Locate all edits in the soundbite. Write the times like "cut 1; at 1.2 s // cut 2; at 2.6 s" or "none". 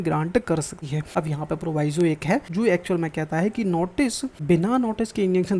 cut 1; at 0.9 s // cut 2; at 2.5 s // cut 3; at 4.3 s